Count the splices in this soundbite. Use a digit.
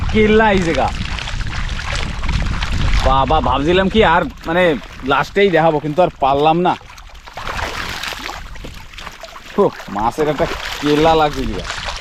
0